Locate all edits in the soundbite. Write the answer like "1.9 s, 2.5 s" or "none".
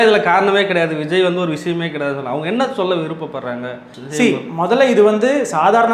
none